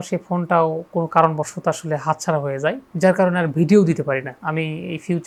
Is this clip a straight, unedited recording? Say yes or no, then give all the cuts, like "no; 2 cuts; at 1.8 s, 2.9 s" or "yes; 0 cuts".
yes; 0 cuts